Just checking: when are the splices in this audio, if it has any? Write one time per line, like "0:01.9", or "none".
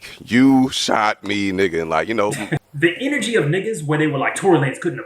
0:02.6